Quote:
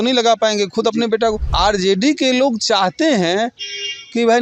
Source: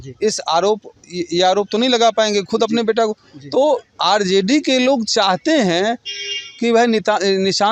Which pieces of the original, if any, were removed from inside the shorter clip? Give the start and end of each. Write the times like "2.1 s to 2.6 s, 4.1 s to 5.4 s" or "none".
3.2 s to 3.9 s